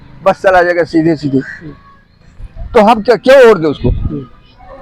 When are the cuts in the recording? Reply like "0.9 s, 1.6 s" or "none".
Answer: none

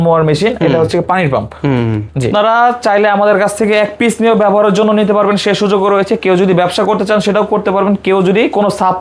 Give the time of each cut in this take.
2.3 s

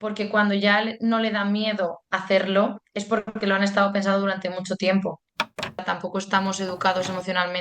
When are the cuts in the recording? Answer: 5.8 s

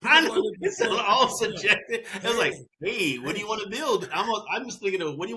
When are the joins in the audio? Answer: none

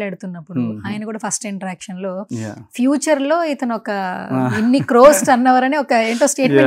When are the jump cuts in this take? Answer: none

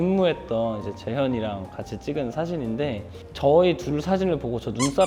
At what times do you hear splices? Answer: none

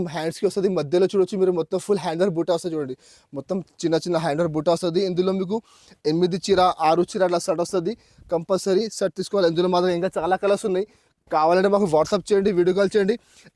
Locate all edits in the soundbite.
none

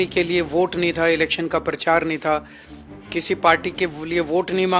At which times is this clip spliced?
none

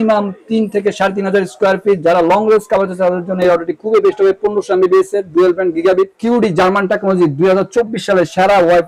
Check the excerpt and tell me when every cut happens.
6.2 s

